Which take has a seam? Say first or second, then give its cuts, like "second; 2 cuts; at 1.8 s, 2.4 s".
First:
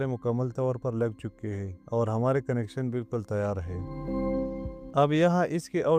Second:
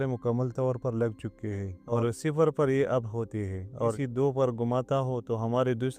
second; 2 cuts; at 1.9 s, 4.0 s